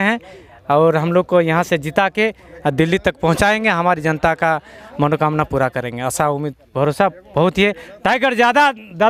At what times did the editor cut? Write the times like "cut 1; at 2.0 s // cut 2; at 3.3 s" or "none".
none